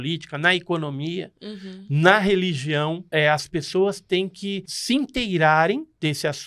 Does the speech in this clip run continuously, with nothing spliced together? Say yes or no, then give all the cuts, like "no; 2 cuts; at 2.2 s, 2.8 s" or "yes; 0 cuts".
no; 2 cuts; at 3.1 s, 4.7 s